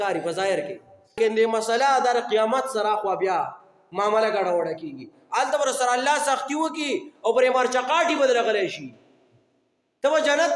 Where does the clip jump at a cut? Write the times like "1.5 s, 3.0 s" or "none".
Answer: 1.2 s